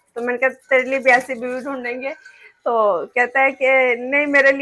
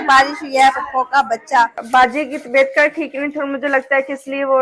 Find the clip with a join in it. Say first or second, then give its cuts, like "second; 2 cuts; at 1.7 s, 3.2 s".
second; 1 cut; at 1.8 s